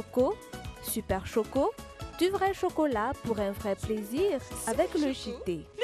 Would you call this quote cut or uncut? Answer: uncut